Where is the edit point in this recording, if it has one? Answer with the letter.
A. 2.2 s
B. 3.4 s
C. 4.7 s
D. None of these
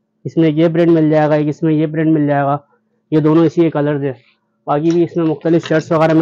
D